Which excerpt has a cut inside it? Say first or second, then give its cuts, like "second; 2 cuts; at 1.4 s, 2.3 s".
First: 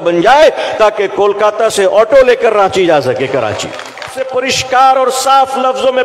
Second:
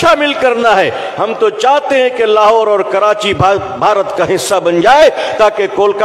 first; 1 cut; at 4.2 s